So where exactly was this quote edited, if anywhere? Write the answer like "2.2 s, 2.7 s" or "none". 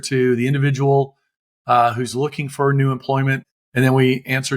3.5 s